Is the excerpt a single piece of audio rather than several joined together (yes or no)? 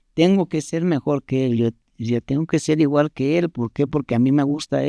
yes